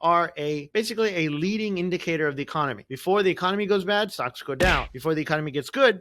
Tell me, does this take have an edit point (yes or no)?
no